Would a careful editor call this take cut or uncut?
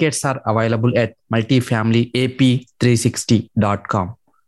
uncut